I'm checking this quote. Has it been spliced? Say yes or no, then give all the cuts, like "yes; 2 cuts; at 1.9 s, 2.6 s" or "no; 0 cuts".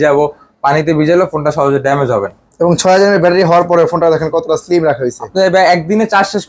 no; 0 cuts